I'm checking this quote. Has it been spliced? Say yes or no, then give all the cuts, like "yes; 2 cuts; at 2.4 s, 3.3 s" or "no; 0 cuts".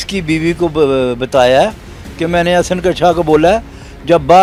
no; 0 cuts